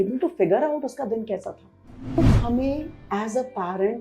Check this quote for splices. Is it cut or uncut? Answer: cut